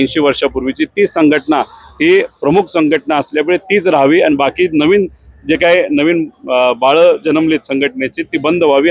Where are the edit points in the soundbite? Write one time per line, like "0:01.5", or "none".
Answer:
none